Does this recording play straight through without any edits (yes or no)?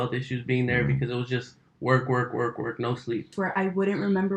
no